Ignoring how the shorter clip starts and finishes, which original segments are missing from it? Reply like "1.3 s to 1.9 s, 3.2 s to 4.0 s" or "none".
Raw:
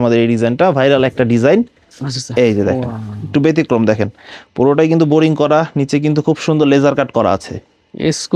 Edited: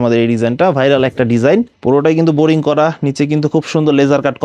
1.7 s to 4.5 s